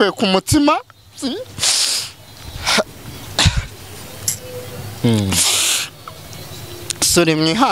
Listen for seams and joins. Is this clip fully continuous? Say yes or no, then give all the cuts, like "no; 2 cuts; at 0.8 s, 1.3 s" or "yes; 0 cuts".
yes; 0 cuts